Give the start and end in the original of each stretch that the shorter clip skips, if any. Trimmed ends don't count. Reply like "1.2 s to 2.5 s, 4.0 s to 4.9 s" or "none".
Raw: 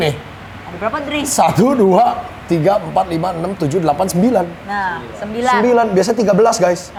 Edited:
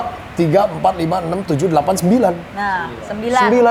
none